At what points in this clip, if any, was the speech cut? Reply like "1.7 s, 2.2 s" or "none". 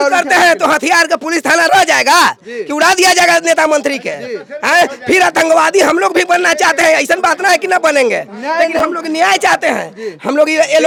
none